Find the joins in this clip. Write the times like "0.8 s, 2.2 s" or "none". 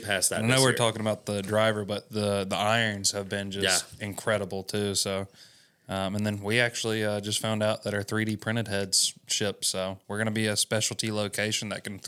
none

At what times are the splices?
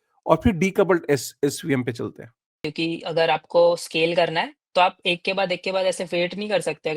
2.6 s

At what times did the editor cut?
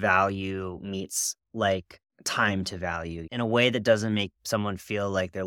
3.3 s

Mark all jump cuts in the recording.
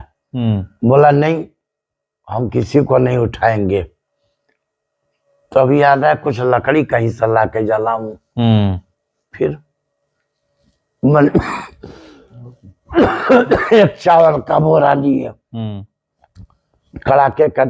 none

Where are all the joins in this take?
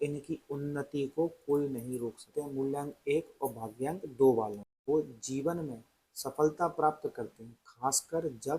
2.2 s, 4.7 s

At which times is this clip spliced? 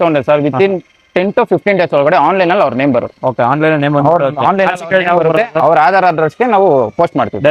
none

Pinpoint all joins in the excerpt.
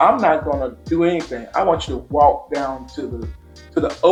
none

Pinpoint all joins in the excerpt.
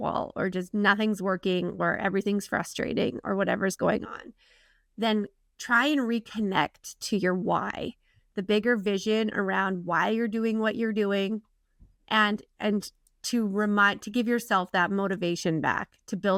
none

